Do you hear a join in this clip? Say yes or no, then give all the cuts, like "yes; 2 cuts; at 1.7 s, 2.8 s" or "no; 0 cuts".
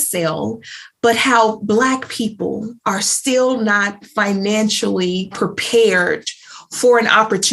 yes; 1 cut; at 5.3 s